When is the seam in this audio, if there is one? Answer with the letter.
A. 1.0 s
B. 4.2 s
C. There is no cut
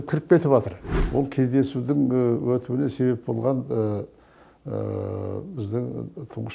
A